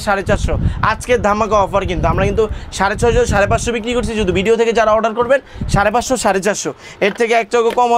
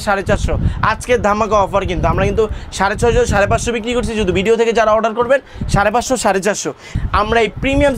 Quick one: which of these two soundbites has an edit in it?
second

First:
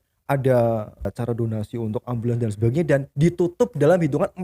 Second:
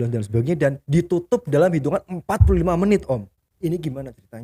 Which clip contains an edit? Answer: first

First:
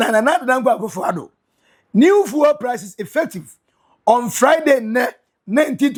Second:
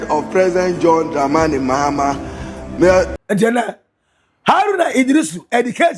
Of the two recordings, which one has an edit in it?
second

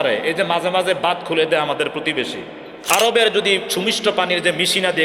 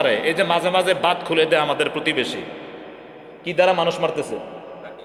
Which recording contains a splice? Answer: first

